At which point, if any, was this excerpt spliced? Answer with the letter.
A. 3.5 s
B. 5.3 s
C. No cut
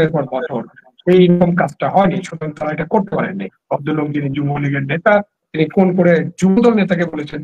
A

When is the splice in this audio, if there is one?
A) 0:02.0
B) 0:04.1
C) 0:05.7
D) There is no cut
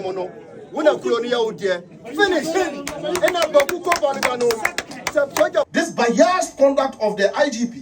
C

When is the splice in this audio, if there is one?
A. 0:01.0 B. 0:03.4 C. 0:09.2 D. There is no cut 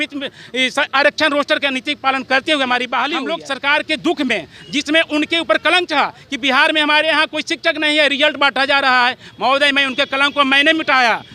B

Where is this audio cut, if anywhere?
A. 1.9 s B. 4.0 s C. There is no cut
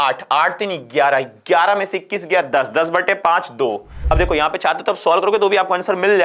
B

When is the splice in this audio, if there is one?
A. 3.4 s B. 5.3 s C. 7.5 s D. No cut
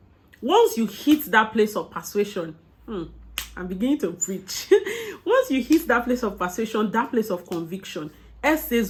D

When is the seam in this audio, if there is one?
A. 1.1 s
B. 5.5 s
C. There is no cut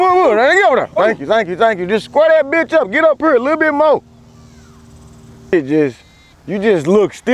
B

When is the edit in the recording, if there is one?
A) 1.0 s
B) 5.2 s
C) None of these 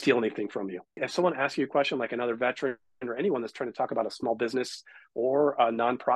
A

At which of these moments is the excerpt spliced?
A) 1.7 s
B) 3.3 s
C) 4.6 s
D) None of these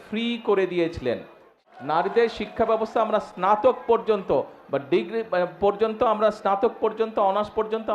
A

